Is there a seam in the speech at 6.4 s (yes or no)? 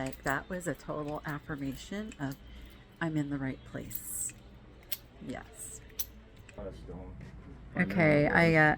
yes